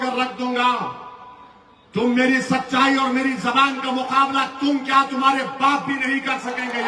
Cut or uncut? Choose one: uncut